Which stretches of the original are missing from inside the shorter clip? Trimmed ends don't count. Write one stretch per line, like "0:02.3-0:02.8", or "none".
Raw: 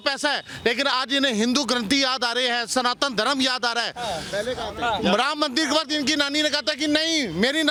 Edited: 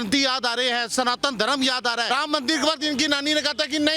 0:03.9-0:05.2